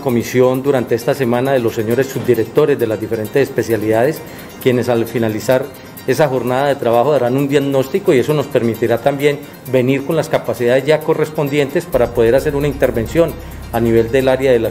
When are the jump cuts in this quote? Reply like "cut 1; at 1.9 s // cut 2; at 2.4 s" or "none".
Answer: none